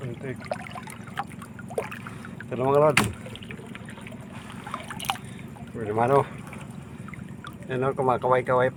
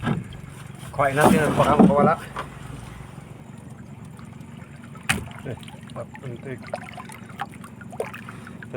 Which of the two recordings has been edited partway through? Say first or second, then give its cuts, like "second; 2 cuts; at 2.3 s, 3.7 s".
second; 1 cut; at 3.4 s